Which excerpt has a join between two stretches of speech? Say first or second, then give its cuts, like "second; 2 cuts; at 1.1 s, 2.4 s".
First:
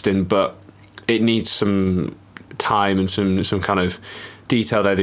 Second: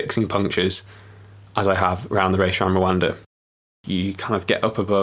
second; 1 cut; at 3.7 s